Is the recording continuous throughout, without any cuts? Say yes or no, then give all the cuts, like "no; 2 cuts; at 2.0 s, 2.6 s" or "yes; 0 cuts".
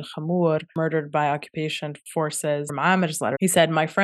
no; 3 cuts; at 0.7 s, 1.9 s, 3.0 s